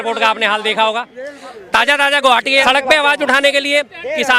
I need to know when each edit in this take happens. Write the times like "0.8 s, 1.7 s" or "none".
2.6 s